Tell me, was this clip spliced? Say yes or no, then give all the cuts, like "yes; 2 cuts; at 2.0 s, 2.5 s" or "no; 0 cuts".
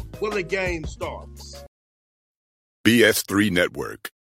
yes; 1 cut; at 1.6 s